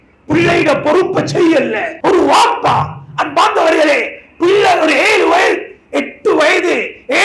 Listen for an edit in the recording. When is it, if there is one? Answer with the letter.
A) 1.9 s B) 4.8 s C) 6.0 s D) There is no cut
A